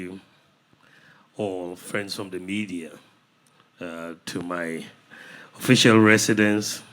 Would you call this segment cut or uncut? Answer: cut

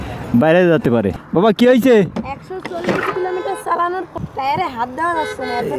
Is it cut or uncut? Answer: cut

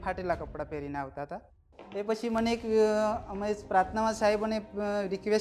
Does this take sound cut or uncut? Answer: uncut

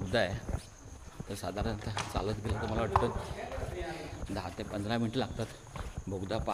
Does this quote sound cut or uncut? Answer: uncut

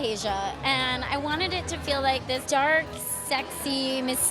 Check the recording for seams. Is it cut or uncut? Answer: cut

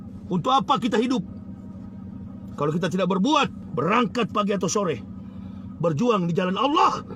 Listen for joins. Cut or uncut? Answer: cut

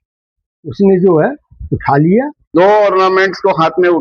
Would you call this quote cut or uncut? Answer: cut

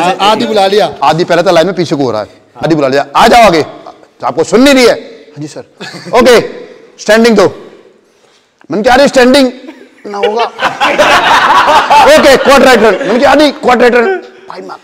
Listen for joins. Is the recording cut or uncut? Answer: cut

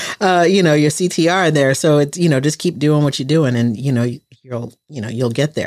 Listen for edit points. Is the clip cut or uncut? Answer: uncut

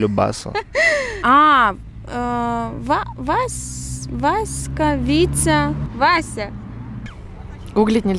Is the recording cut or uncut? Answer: cut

